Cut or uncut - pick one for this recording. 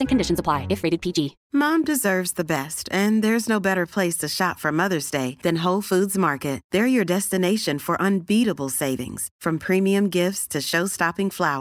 cut